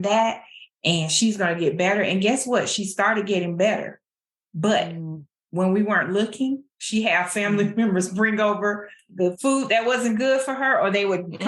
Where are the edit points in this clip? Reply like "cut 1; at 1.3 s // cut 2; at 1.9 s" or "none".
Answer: cut 1; at 9.0 s